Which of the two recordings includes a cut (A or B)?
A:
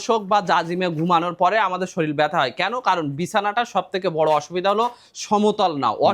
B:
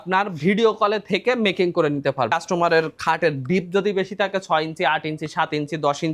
B